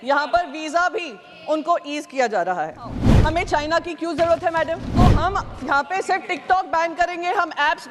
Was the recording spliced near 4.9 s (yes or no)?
yes